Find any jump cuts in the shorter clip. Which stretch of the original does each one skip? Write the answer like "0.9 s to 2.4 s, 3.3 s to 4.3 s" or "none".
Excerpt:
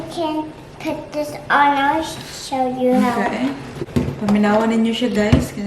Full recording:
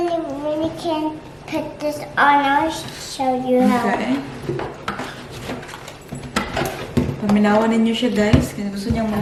4.5 s to 6.8 s